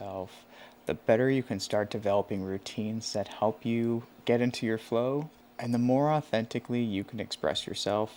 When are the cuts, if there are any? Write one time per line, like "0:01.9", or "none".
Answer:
none